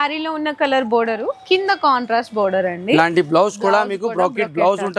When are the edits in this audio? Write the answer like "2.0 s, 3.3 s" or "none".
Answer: none

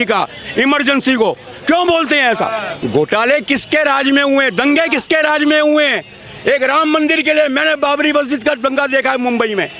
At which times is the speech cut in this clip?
2.7 s

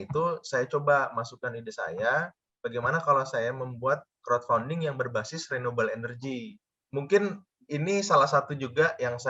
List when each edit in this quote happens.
6.7 s

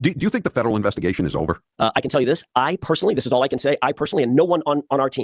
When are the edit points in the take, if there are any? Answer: 1.6 s

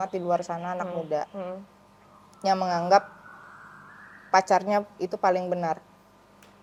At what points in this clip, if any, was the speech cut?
none

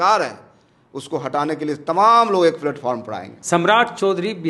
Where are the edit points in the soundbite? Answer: 3.3 s

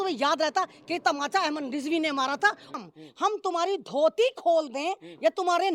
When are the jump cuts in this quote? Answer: 2.7 s

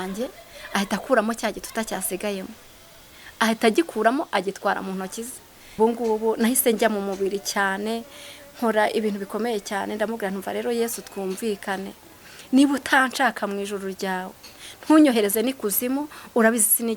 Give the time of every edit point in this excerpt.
5.8 s

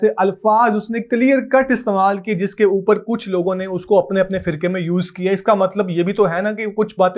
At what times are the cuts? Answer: none

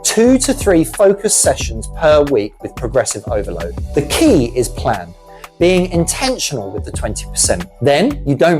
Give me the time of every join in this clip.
3.8 s

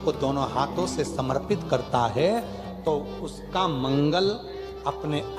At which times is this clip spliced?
none

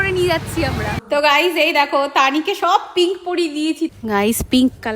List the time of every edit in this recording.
1.0 s, 4.0 s

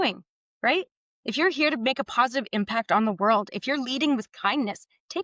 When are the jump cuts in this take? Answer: none

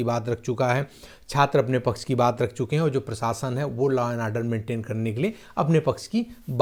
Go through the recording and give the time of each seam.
none

